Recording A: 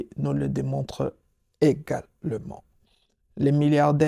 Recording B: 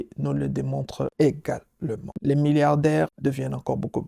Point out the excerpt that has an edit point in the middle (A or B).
B